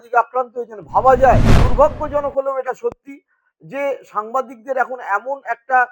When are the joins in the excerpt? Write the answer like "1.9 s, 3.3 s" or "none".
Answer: 1.6 s